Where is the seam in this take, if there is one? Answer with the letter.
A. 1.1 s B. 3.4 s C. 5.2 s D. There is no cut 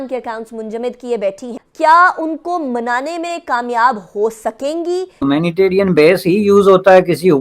C